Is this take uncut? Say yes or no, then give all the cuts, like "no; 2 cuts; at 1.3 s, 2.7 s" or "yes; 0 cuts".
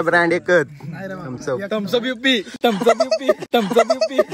no; 1 cut; at 3.4 s